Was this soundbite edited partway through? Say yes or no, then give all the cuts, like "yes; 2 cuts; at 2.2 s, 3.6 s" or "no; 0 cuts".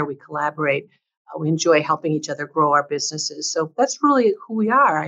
no; 0 cuts